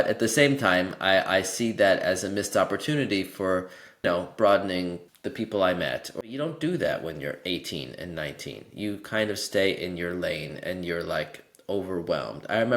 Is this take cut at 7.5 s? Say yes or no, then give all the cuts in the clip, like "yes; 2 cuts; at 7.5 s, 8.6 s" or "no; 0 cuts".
no; 3 cuts; at 4.0 s, 5.1 s, 6.1 s